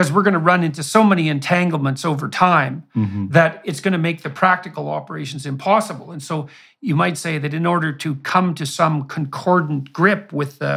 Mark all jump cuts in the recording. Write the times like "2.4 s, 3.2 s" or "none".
none